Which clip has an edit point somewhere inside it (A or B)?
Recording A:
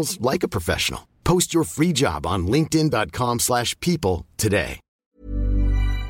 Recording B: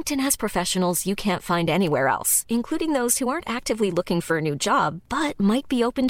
A